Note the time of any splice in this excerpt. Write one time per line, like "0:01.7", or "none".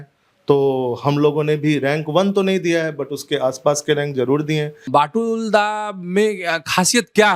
0:04.8